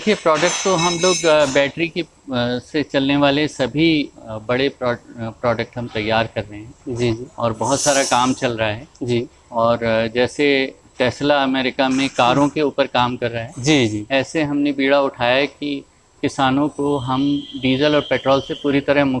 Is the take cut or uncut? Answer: uncut